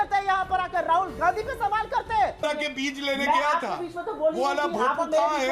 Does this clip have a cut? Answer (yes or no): yes